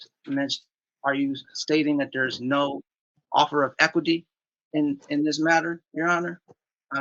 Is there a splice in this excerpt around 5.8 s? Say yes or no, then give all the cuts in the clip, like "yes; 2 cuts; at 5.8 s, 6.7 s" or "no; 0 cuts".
no; 0 cuts